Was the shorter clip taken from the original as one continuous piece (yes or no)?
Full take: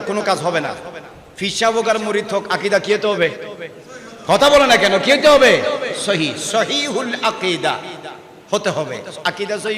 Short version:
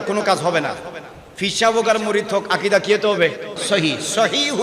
no